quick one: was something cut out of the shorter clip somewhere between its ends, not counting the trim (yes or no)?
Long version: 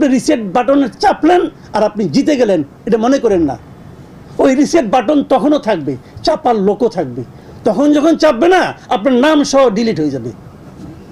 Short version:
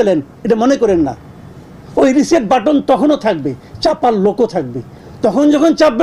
no